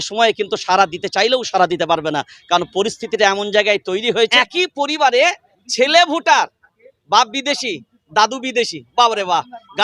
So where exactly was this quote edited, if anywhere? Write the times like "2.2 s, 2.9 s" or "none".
4.3 s

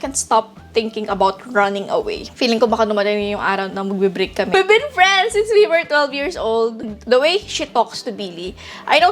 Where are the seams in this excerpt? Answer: 2.2 s, 4.5 s, 6.8 s

